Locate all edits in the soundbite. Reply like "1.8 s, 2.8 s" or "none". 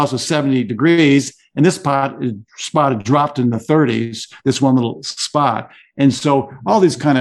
none